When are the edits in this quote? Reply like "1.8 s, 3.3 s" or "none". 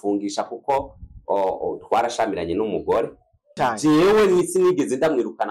3.5 s